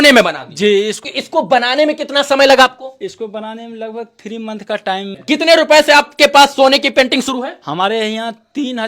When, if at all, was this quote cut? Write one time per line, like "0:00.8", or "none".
0:01.0
0:05.1